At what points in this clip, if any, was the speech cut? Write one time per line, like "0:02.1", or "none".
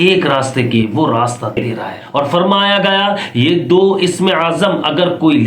0:02.2

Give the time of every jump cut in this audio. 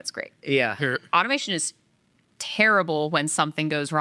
none

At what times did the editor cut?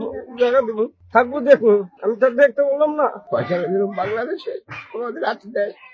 0:01.0
0:02.0
0:03.2

